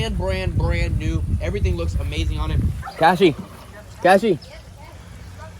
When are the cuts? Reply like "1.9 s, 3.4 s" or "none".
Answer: 2.8 s